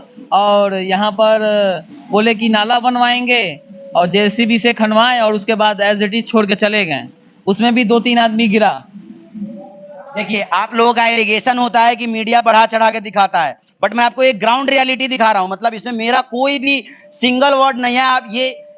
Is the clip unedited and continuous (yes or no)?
yes